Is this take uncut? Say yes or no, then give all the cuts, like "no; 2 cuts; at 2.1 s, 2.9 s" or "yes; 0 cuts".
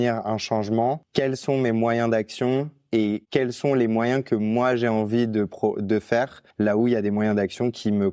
no; 2 cuts; at 1.0 s, 6.4 s